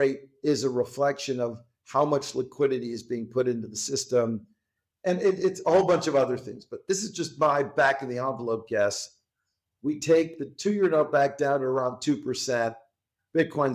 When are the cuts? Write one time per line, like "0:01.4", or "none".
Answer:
none

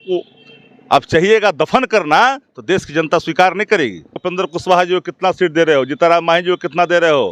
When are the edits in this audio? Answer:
0:04.2

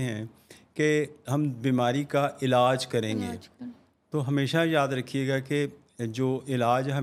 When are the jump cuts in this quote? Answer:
none

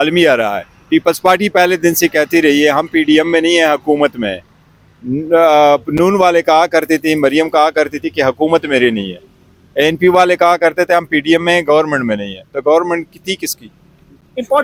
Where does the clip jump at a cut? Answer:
none

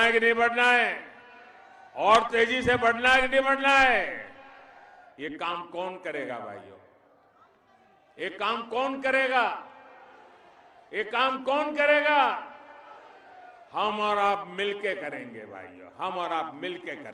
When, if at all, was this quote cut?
none

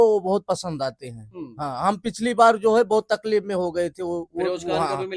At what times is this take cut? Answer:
none

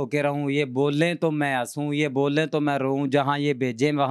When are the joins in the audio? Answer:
none

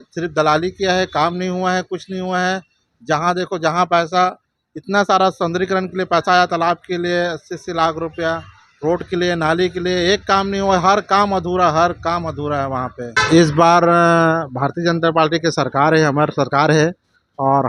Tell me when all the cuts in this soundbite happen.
0:13.0

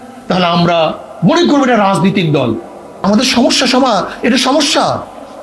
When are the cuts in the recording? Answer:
0:03.0

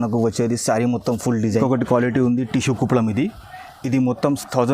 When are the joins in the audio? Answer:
0:01.5

